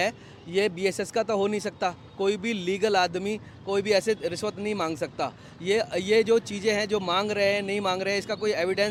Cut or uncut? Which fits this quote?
uncut